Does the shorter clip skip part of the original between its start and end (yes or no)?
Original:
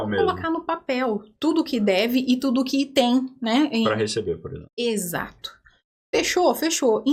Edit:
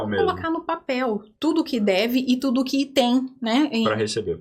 no